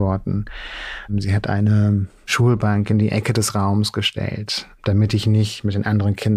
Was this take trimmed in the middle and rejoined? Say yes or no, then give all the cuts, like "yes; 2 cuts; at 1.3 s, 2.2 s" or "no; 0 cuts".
yes; 3 cuts; at 1.1 s, 2.3 s, 4.7 s